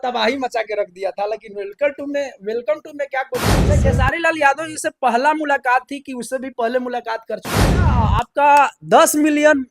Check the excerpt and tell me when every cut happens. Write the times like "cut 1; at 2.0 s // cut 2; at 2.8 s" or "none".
cut 1; at 3.6 s // cut 2; at 7.8 s

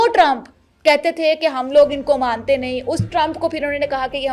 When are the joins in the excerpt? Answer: none

